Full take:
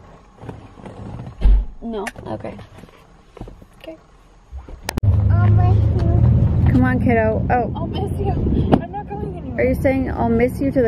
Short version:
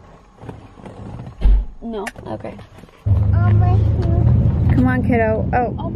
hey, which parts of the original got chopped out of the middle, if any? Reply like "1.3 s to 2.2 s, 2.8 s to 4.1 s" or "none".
3.1 s to 5.0 s